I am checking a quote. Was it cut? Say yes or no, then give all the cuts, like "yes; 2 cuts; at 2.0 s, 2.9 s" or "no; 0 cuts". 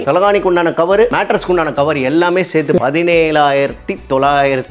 yes; 1 cut; at 2.8 s